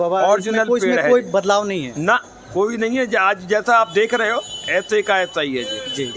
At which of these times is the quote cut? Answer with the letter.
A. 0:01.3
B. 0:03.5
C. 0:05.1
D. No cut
D